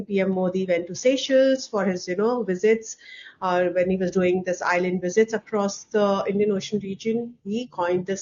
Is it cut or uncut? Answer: uncut